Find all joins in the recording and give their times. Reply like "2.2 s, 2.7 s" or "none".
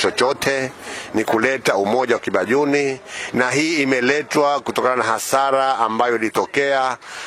none